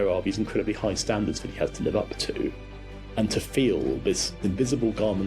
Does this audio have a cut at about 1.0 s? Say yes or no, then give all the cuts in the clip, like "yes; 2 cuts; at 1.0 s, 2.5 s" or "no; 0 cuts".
no; 2 cuts; at 2.7 s, 4.3 s